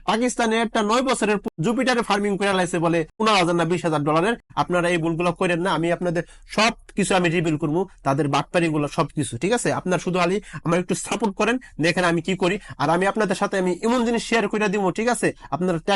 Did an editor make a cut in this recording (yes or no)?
yes